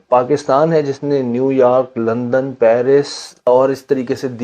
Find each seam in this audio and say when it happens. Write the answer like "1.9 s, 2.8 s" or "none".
3.5 s